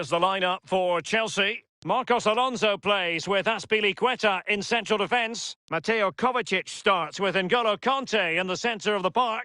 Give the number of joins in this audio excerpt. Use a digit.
1